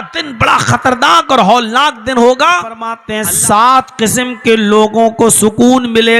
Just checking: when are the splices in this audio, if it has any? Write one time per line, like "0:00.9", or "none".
0:03.1